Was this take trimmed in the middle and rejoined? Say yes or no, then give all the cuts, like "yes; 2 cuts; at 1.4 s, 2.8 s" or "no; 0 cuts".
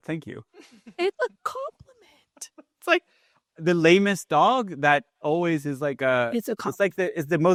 no; 0 cuts